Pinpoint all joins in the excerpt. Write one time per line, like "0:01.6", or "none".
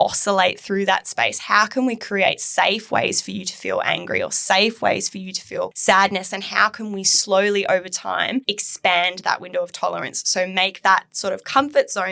0:05.7
0:08.6